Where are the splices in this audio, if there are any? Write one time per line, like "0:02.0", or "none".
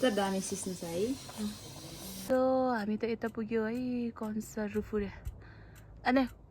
0:02.3